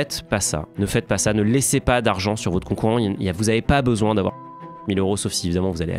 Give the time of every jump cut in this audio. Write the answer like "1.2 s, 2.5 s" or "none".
none

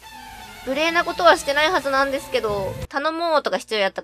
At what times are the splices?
2.8 s

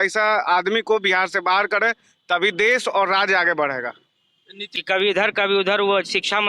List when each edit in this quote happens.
4.8 s

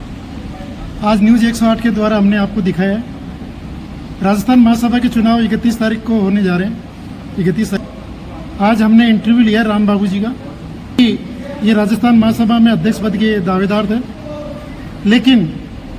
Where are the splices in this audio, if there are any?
7.8 s, 11.0 s

